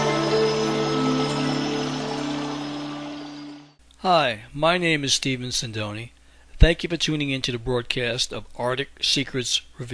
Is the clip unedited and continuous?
no; 1 cut; at 8.0 s

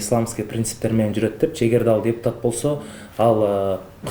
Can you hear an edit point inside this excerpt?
no; 0 cuts

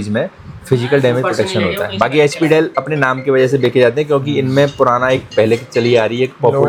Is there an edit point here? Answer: no; 0 cuts

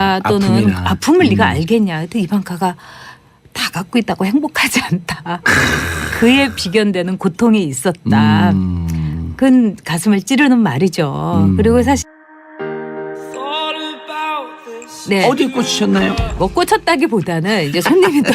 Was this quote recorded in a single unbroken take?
no; 1 cut; at 12.0 s

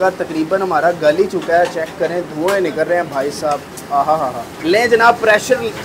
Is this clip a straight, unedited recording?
yes; 0 cuts

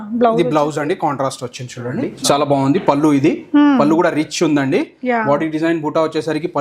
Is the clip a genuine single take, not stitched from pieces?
no; 1 cut; at 2.1 s

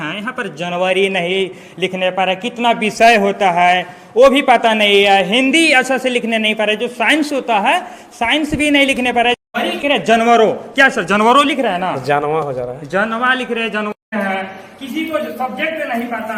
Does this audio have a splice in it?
no; 0 cuts

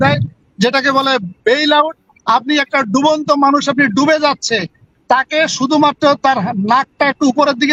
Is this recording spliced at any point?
no; 0 cuts

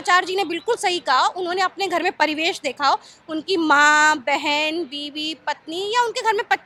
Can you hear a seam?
no; 0 cuts

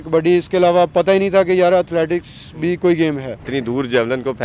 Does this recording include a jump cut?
yes; 1 cut; at 3.5 s

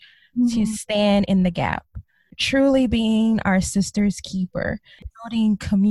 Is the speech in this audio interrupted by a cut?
yes; 2 cuts; at 2.3 s, 5.0 s

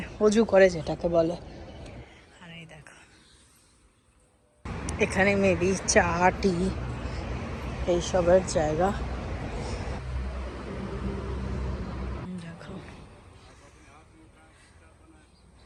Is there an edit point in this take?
no; 0 cuts

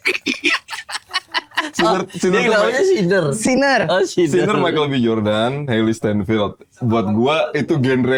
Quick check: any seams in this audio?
no; 0 cuts

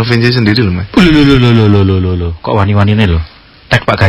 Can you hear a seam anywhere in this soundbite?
no; 0 cuts

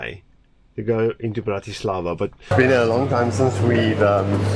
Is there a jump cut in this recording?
yes; 1 cut; at 2.5 s

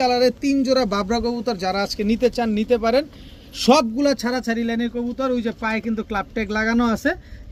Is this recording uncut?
yes; 0 cuts

